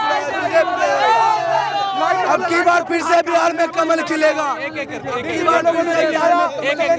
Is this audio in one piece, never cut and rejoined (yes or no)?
yes